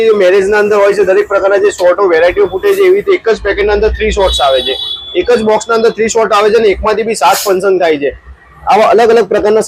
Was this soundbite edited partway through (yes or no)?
no